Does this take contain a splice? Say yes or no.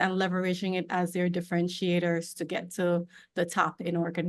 no